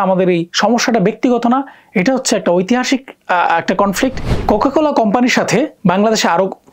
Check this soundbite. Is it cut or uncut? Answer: cut